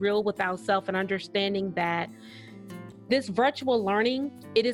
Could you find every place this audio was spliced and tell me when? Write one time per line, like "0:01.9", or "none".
none